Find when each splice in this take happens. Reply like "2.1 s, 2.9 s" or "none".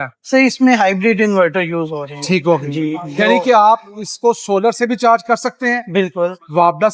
none